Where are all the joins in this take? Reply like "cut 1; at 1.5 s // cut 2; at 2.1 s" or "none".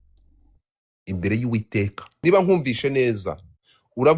cut 1; at 2.0 s